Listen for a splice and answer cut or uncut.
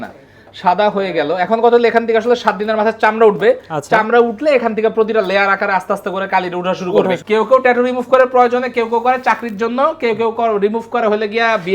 cut